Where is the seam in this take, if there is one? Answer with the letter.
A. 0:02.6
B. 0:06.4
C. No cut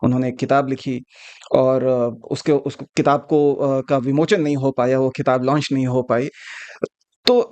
C